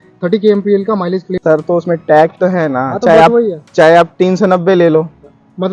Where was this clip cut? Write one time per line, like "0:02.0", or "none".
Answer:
0:01.4

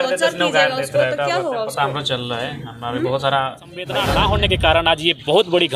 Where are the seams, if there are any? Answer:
0:04.0

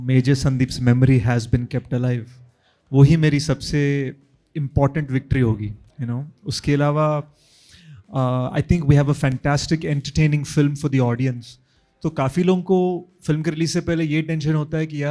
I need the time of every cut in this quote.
none

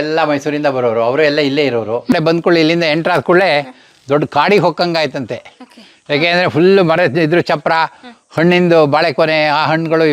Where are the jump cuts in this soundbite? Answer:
0:02.1

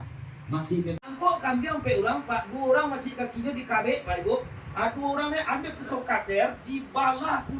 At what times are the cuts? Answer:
0:01.0

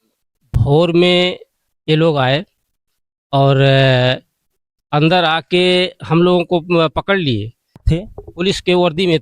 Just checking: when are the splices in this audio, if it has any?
0:07.8

